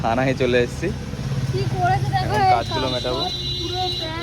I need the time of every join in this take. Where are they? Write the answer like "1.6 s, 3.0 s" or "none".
1.1 s